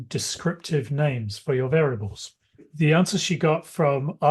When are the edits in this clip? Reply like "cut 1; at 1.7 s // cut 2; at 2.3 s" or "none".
cut 1; at 2.7 s